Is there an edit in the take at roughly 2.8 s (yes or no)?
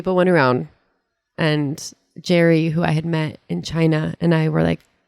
no